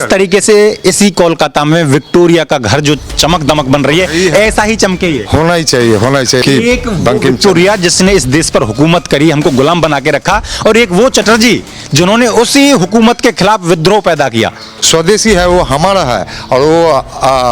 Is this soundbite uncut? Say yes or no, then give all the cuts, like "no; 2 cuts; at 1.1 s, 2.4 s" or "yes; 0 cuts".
no; 2 cuts; at 6.4 s, 14.7 s